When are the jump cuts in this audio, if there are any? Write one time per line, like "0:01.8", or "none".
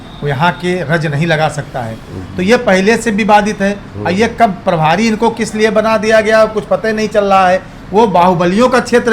none